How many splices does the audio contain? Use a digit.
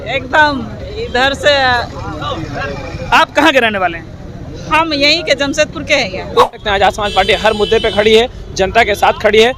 1